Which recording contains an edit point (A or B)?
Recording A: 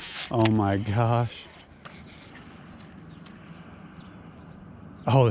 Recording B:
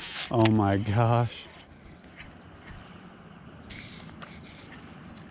A